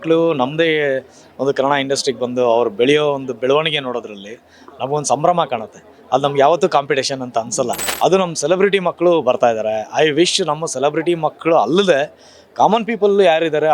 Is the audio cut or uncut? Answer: cut